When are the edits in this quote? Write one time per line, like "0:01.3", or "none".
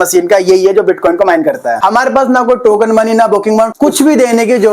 0:01.8
0:03.7

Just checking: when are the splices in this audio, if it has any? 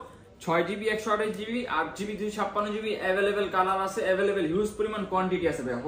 none

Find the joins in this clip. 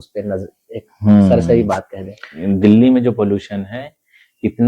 0:02.3

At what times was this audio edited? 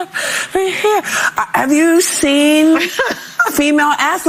0:01.4

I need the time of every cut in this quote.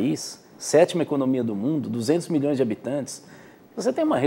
none

